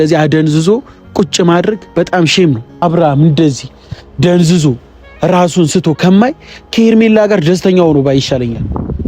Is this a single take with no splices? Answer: no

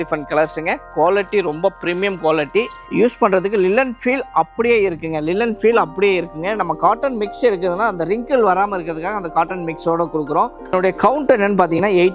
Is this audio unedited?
no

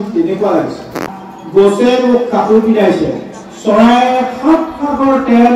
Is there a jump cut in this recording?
yes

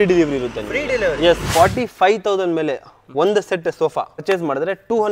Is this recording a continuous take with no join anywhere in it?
no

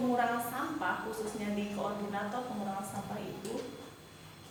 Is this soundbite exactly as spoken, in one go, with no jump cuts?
yes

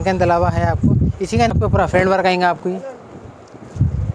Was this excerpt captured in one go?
no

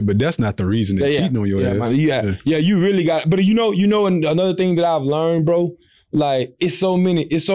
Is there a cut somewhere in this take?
no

